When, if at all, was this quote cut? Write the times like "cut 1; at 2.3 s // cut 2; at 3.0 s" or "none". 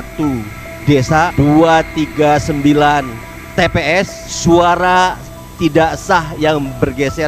cut 1; at 1.3 s // cut 2; at 4.2 s

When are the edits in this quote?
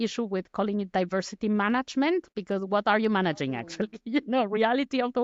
cut 1; at 2.3 s

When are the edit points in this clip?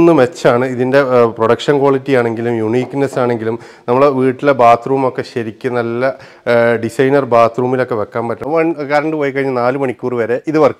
cut 1; at 8.4 s

